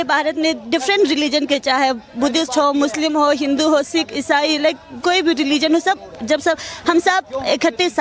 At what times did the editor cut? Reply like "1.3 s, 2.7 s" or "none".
none